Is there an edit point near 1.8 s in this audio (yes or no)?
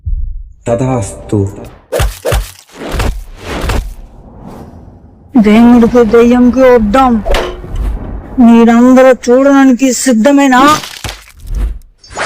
yes